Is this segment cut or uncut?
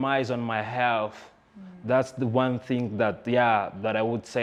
uncut